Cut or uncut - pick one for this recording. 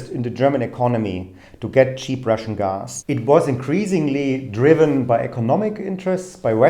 cut